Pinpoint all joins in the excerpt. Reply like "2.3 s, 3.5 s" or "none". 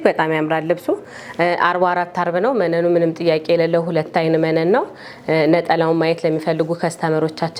none